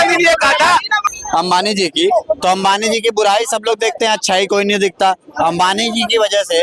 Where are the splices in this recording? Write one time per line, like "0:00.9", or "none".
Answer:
0:01.0